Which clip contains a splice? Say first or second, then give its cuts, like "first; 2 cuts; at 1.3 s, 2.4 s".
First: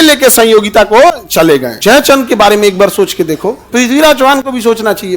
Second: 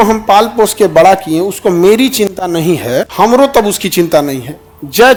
first; 2 cuts; at 1.7 s, 3.6 s